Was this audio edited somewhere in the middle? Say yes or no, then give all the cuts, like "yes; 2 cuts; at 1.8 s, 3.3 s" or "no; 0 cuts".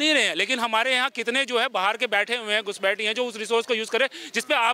no; 0 cuts